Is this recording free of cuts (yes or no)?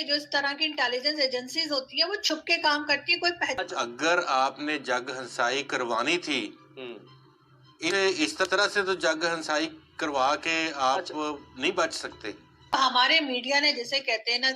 no